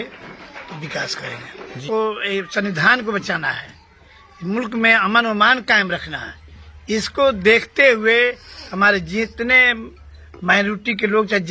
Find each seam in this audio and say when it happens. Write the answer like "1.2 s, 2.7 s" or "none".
1.8 s